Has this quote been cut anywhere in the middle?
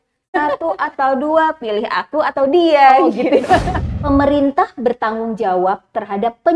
yes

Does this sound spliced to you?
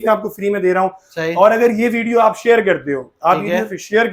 no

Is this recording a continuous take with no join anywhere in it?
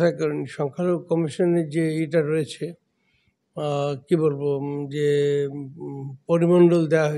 yes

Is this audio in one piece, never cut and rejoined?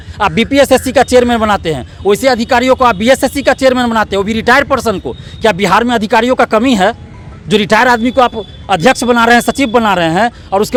yes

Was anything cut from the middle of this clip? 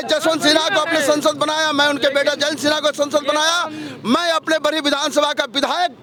no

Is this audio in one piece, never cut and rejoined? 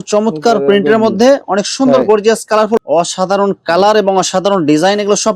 no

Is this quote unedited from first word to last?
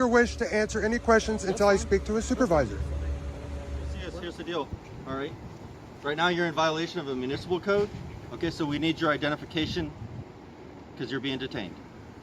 no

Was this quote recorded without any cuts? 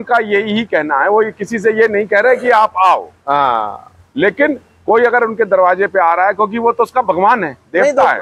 yes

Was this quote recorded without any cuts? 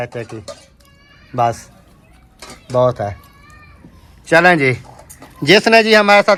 yes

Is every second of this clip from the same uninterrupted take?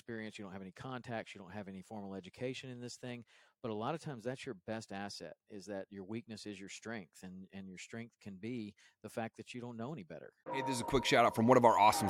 no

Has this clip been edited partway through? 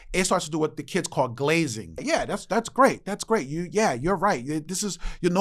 yes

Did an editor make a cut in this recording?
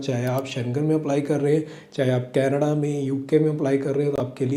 no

